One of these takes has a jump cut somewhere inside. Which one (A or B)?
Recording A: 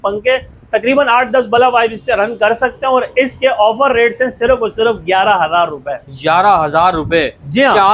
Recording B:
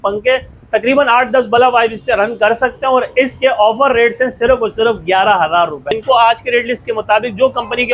B